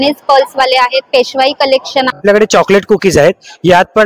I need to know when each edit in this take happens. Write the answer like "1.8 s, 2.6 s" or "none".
2.2 s